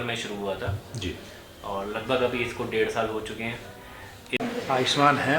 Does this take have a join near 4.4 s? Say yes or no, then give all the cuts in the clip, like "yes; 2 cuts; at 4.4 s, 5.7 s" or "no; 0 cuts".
yes; 1 cut; at 4.4 s